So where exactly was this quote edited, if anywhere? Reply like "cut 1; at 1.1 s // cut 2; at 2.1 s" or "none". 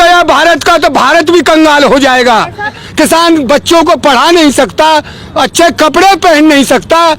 cut 1; at 2.8 s

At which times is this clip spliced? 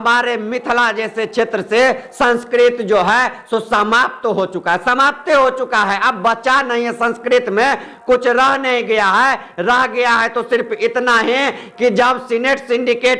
none

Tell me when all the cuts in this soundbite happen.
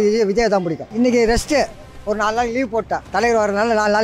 cut 1; at 0.9 s // cut 2; at 3.1 s

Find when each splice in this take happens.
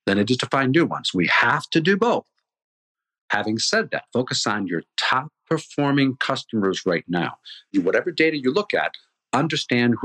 cut 1; at 7.7 s

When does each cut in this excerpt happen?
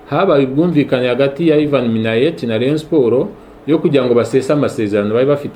none

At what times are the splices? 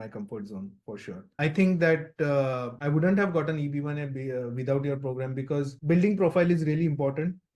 cut 1; at 1.3 s

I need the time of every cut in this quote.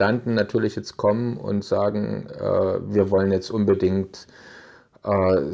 none

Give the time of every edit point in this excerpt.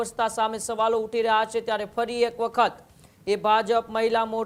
none

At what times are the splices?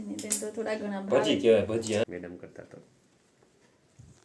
cut 1; at 2.1 s

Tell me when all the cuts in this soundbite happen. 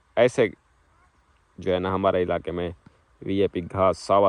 none

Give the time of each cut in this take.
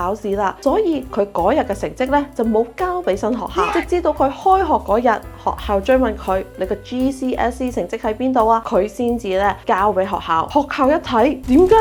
none

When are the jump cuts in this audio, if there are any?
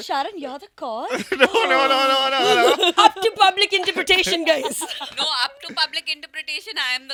none

